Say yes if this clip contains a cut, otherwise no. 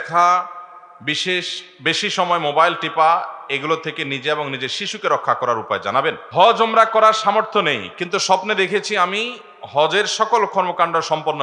yes